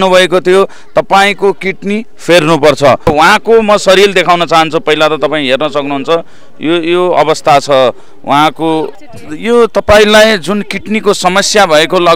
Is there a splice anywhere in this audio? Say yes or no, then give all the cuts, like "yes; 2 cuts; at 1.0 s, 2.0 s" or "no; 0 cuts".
yes; 1 cut; at 8.9 s